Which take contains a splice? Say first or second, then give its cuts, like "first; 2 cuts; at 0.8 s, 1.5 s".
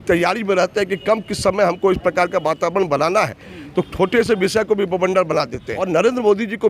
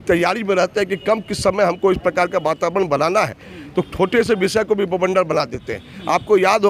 first; 1 cut; at 5.7 s